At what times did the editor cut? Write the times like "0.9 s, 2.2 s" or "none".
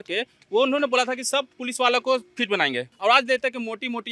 2.9 s